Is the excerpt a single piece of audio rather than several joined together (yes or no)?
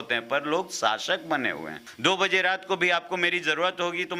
no